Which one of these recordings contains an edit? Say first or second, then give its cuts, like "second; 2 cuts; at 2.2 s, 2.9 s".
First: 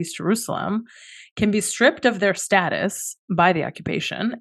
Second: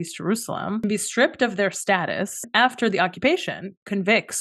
second; 2 cuts; at 0.8 s, 2.5 s